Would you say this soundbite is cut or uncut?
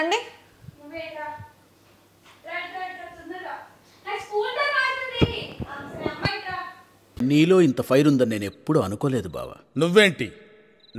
uncut